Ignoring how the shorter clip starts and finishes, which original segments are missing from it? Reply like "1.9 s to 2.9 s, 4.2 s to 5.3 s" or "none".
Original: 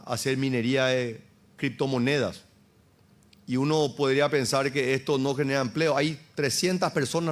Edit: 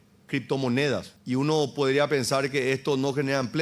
2.4 s to 3.3 s